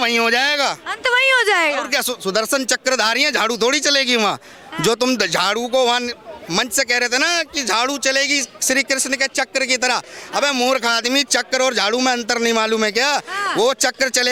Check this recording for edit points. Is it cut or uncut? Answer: uncut